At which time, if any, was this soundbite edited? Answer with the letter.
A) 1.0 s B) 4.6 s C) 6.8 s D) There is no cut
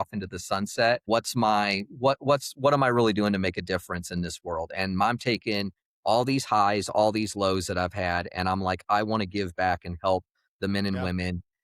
A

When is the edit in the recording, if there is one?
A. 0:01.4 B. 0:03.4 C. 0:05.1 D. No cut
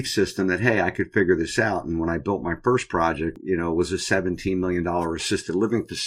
B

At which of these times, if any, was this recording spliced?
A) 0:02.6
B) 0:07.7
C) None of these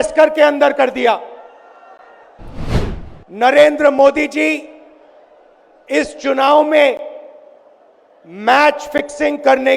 A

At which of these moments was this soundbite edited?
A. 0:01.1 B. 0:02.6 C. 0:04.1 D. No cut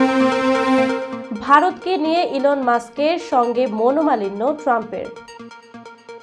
D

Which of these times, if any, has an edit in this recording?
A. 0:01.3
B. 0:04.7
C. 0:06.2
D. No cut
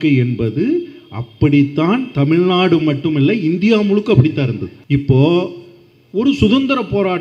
B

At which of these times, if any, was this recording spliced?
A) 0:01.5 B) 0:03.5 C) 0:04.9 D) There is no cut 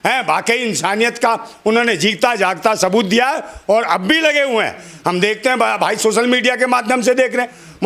D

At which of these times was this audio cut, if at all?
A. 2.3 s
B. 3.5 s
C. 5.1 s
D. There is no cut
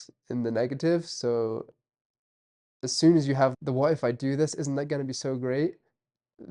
B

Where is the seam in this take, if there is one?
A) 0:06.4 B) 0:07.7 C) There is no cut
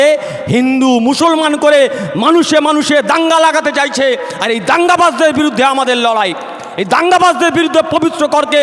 C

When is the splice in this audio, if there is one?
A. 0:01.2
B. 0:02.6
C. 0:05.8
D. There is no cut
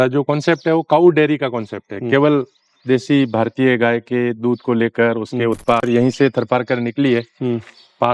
C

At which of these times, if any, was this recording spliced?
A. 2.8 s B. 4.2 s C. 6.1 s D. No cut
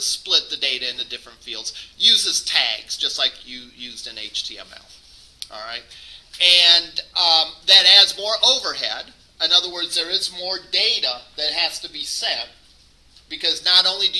A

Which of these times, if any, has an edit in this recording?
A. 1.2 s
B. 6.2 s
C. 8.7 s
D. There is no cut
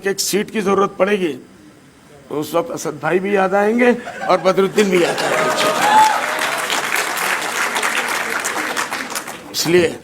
D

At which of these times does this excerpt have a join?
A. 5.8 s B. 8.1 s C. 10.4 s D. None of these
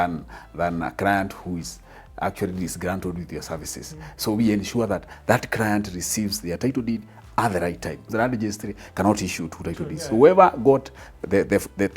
B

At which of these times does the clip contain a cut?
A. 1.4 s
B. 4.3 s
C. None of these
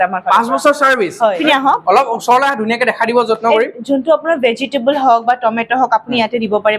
A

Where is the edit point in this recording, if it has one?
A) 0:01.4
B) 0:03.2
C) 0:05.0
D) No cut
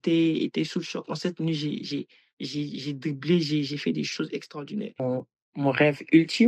C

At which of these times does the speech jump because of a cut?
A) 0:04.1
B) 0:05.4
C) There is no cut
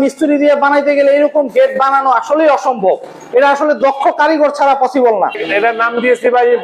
B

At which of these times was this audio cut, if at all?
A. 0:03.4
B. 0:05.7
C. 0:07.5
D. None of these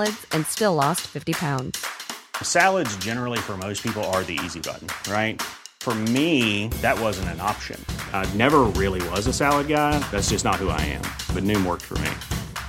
D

